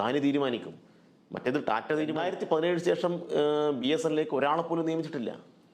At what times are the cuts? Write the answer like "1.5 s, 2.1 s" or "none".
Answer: 2.2 s